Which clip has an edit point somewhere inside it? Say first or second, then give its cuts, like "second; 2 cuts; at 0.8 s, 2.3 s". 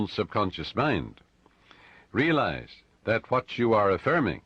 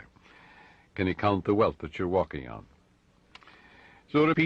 second; 1 cut; at 1.9 s